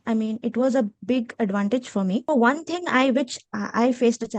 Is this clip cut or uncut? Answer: cut